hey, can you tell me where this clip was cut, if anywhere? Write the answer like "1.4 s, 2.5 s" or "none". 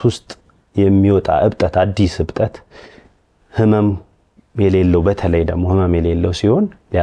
none